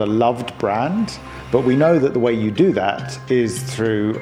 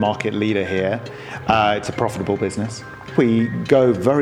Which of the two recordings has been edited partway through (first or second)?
second